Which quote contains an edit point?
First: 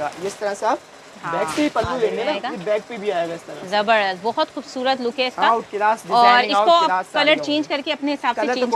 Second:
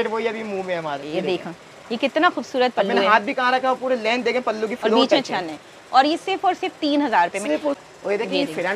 second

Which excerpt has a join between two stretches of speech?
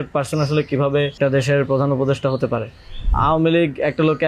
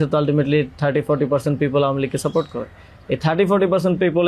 first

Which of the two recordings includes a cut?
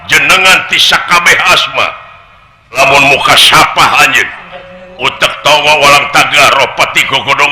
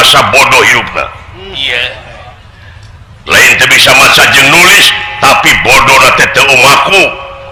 first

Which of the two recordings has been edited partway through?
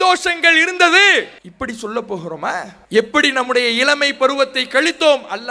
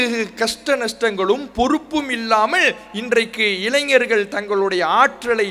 first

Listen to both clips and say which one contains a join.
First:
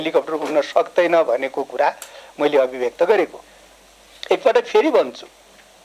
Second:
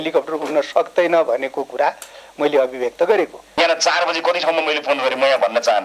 second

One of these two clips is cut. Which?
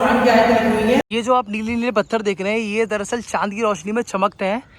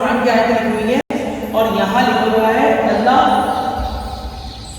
first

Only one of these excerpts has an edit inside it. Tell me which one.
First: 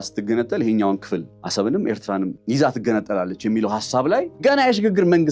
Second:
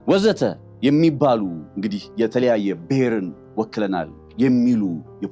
first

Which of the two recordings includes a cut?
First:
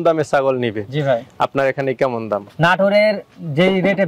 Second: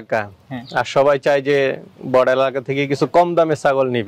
first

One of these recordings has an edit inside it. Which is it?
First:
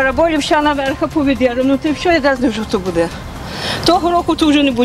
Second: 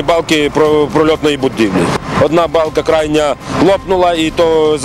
second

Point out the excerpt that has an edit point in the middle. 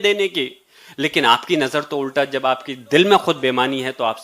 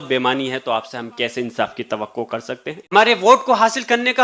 second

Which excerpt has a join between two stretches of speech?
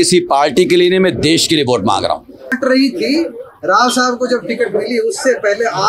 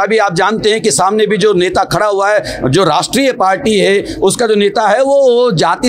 first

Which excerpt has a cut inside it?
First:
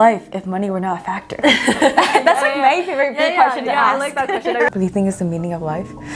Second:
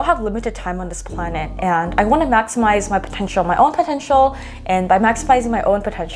first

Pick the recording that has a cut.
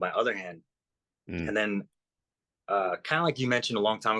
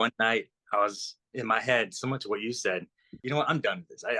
second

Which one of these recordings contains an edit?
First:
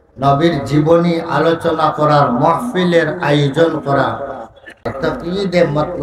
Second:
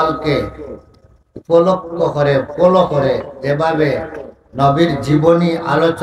first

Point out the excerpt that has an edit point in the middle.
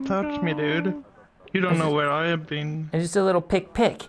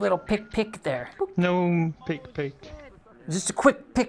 second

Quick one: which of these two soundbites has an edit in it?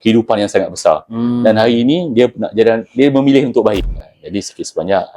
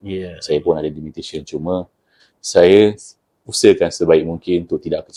first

